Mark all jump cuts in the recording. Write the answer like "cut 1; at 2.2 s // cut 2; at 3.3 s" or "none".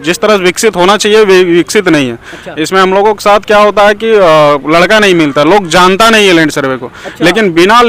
none

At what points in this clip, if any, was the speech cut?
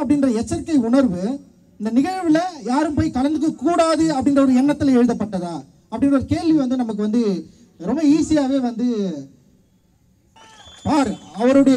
cut 1; at 10.4 s

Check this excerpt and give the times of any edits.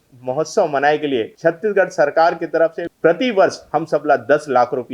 cut 1; at 1.3 s // cut 2; at 2.9 s

